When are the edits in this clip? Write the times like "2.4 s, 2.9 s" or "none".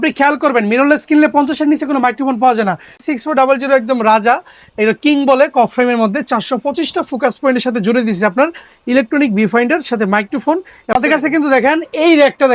3.0 s, 10.8 s